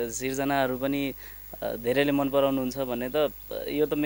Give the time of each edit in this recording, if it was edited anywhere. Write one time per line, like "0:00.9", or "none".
none